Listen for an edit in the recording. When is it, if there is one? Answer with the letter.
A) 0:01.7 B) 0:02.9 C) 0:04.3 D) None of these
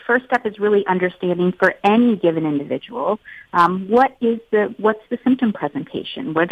D